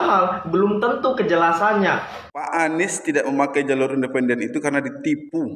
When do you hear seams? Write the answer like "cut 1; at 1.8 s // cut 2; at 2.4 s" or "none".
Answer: cut 1; at 2.1 s